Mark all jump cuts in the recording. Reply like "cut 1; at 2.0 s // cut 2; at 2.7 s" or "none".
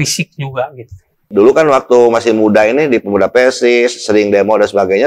cut 1; at 1.3 s